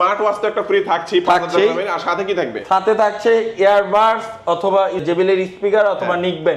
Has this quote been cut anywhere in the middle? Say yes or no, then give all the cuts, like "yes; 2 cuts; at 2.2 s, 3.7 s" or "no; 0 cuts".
yes; 1 cut; at 5.0 s